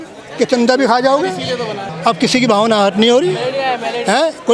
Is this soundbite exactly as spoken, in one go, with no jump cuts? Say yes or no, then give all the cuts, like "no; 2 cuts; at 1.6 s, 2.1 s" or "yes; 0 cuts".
no; 1 cut; at 1.8 s